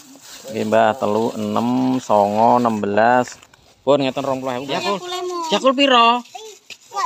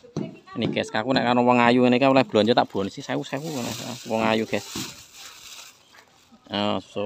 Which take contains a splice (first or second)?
first